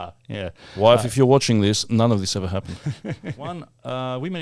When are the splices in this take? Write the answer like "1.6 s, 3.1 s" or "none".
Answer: 3.5 s